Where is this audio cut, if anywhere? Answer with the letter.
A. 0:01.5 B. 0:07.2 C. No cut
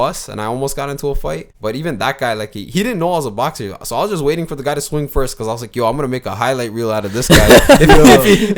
A